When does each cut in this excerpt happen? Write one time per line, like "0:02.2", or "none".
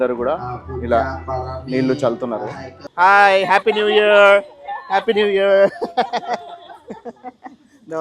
0:02.9